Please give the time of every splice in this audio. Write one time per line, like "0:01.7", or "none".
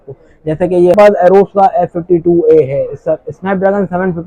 0:00.9